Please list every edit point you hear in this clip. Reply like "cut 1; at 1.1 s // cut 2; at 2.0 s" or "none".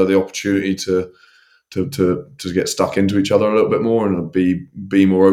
none